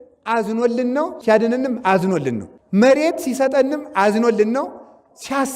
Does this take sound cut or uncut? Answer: cut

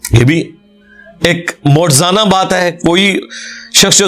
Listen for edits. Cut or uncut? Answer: uncut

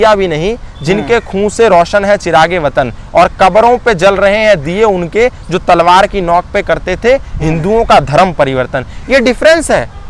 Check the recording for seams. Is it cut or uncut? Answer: uncut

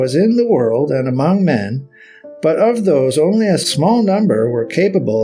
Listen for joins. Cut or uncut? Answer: uncut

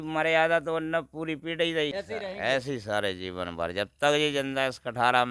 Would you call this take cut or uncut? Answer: cut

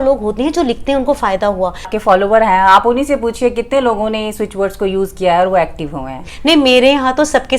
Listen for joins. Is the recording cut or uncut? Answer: cut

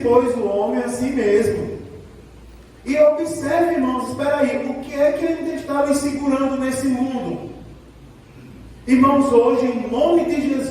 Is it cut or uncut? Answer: uncut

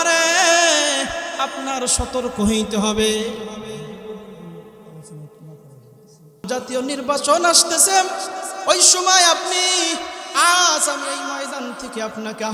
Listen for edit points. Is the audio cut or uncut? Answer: cut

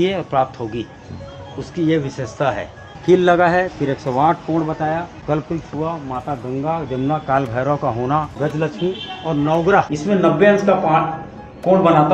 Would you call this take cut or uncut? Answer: cut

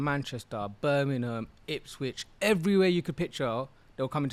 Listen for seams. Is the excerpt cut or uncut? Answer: uncut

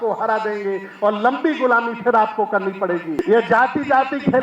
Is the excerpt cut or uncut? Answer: cut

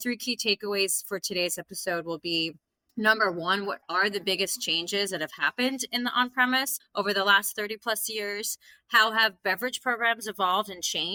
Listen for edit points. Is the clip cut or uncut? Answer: uncut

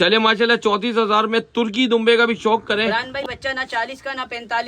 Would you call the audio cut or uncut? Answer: cut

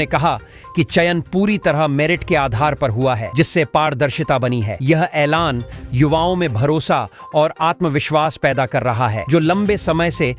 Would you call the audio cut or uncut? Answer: uncut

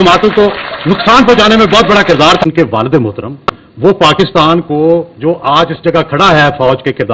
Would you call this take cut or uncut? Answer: cut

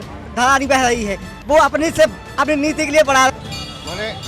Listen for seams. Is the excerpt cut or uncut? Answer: cut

